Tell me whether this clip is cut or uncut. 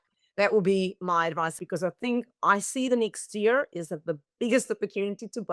cut